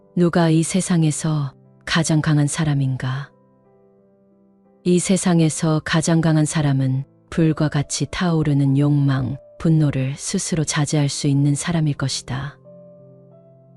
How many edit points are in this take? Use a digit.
1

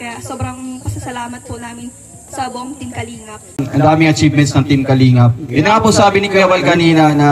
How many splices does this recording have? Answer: 1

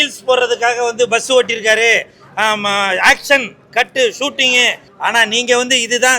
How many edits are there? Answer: 1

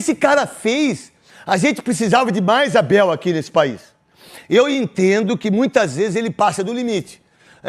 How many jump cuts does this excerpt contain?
0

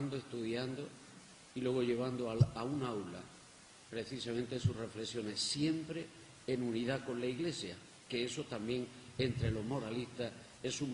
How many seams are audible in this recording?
1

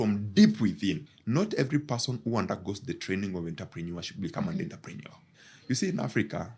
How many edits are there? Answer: 2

